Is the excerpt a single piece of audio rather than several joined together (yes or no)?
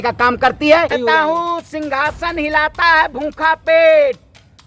no